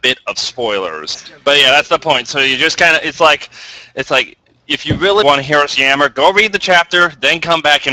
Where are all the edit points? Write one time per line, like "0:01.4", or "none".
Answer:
0:01.2
0:05.2